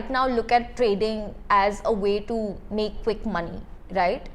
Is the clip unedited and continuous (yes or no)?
yes